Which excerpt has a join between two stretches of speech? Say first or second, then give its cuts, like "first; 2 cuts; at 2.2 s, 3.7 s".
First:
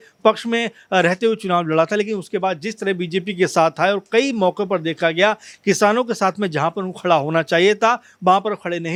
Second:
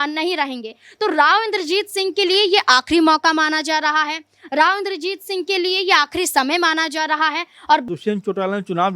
second; 1 cut; at 7.9 s